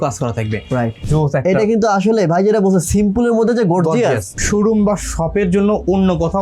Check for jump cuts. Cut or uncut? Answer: cut